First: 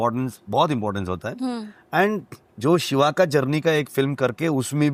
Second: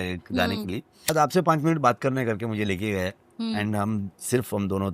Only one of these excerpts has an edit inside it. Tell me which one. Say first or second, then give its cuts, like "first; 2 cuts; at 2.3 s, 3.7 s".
second; 1 cut; at 1.1 s